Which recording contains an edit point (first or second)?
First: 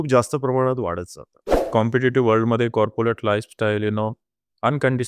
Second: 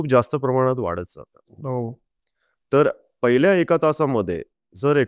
first